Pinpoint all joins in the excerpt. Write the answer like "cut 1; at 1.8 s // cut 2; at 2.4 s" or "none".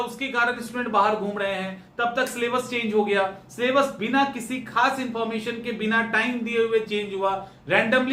none